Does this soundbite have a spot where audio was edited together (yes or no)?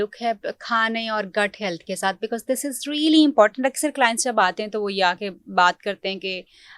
no